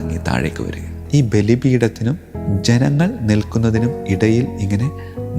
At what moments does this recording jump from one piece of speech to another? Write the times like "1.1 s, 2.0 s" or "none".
1.0 s